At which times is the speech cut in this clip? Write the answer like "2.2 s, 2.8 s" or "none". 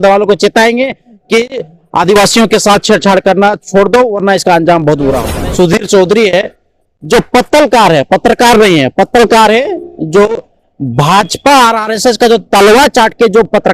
5.3 s